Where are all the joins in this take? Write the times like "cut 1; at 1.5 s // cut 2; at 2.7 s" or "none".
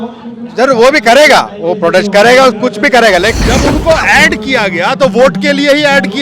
cut 1; at 3.3 s